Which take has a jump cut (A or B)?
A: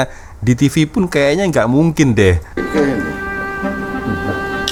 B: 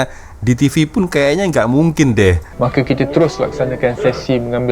B